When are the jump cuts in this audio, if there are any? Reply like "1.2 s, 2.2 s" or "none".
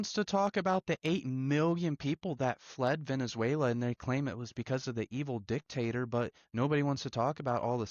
none